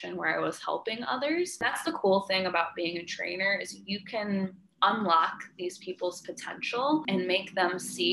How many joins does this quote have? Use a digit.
2